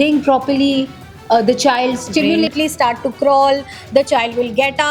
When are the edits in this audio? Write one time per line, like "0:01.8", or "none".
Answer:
0:02.5